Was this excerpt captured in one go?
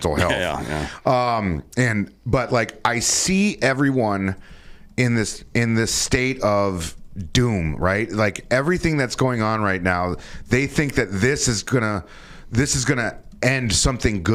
yes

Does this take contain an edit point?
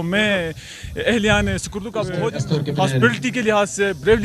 yes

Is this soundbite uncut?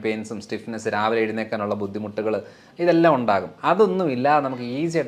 yes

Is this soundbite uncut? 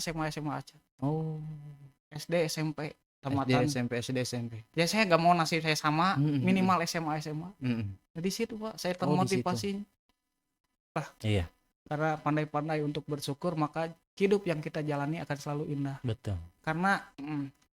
no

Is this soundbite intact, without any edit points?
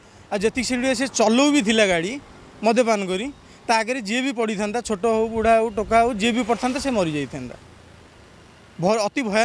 yes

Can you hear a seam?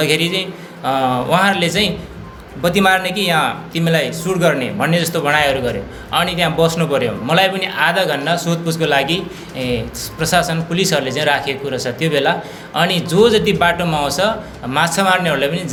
no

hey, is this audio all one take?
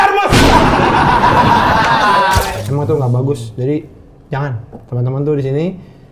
no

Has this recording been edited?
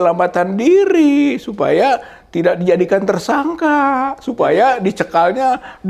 no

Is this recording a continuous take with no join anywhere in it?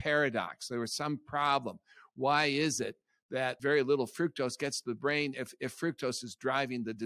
no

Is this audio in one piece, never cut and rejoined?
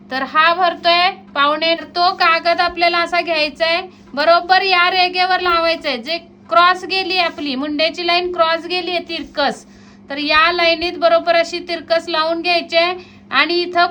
no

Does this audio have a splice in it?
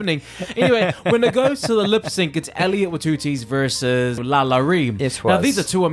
yes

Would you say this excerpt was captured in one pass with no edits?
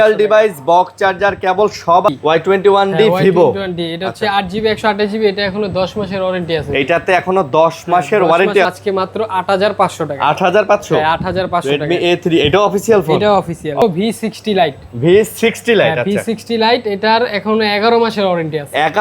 no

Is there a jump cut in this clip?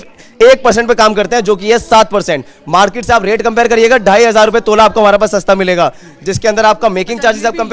no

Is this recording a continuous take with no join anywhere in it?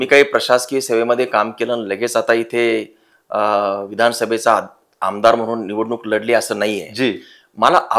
yes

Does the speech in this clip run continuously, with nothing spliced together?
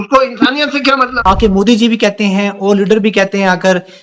no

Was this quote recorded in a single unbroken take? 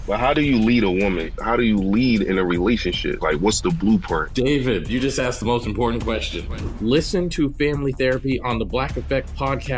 yes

